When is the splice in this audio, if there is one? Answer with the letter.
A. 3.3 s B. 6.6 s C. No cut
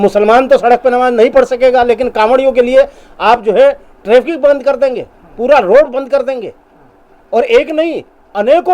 C